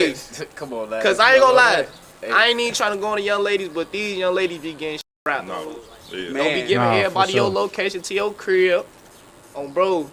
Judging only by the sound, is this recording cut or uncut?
cut